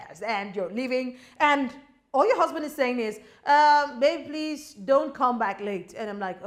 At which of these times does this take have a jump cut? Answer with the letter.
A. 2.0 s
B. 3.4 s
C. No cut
C